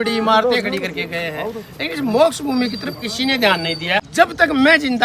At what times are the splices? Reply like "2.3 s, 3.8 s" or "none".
4.0 s